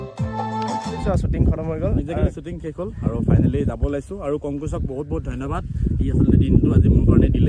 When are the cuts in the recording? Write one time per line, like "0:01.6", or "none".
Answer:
0:01.0